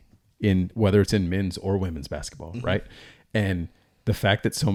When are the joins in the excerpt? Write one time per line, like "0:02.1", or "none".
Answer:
none